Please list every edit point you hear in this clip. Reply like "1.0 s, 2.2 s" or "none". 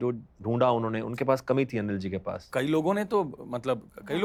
none